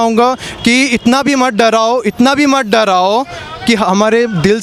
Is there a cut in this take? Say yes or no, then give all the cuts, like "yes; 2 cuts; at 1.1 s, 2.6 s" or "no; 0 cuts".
no; 0 cuts